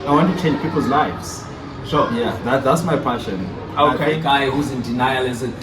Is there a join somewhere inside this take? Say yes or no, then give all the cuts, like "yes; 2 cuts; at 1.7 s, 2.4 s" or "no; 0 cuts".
yes; 1 cut; at 4.2 s